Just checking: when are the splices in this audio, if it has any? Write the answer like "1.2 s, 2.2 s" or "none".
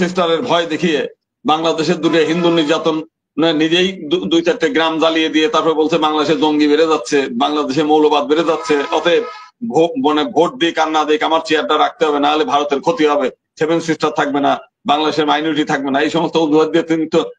none